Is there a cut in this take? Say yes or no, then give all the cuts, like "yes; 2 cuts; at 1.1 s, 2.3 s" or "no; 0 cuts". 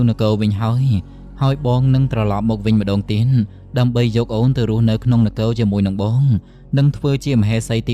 no; 0 cuts